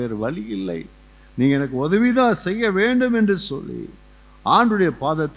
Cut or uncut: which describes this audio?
uncut